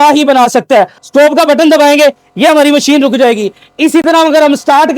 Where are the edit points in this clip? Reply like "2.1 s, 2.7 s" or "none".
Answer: 1.0 s